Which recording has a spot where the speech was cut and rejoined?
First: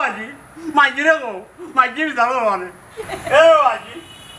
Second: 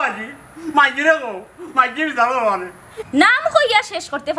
second; 1 cut; at 2.9 s

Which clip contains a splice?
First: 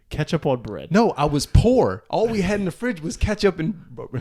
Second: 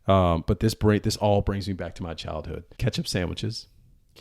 second; 1 cut; at 2.7 s

